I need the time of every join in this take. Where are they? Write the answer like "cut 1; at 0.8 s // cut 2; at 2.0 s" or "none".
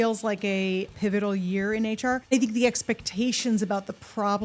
cut 1; at 0.9 s // cut 2; at 2.3 s

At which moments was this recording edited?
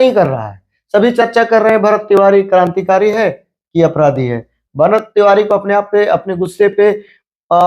cut 1; at 4.6 s

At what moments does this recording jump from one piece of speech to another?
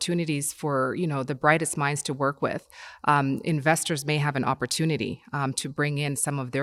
none

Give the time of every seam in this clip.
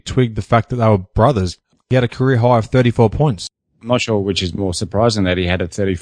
cut 1; at 1.9 s // cut 2; at 3.5 s

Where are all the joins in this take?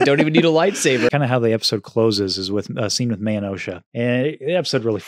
cut 1; at 1.1 s // cut 2; at 3.8 s

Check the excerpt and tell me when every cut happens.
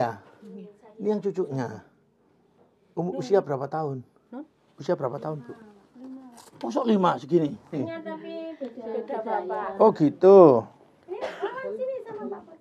cut 1; at 7.8 s

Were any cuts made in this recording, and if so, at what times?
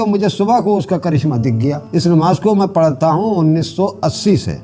cut 1; at 1.8 s

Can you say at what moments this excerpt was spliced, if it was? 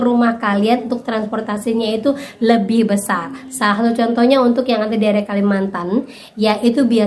none

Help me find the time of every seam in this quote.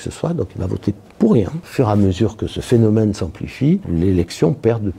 cut 1; at 1.7 s // cut 2; at 3.9 s

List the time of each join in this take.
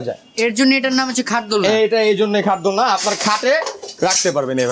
none

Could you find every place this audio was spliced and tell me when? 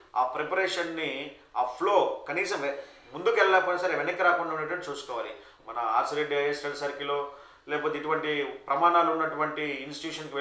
cut 1; at 5.5 s

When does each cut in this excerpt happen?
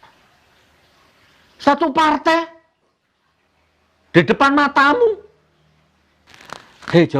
cut 1; at 6.2 s

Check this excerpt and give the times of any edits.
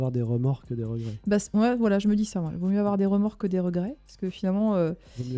none

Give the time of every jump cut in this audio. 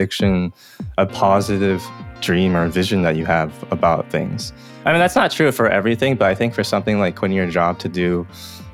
cut 1; at 2.0 s

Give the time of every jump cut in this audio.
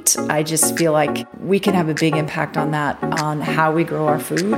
cut 1; at 1.3 s

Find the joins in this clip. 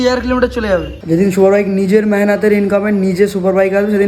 cut 1; at 0.9 s

